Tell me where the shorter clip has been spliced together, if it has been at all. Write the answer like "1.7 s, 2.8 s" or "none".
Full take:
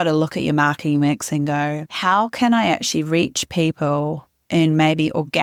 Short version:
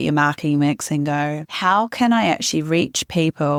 none